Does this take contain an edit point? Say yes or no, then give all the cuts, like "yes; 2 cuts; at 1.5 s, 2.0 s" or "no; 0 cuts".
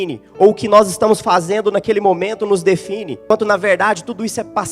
yes; 1 cut; at 3.3 s